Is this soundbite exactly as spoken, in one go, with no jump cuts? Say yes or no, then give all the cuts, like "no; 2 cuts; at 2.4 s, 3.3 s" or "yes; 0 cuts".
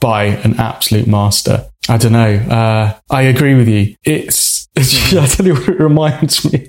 yes; 0 cuts